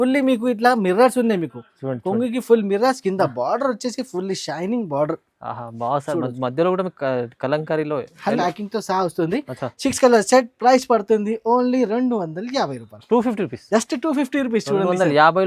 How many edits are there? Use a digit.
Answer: 1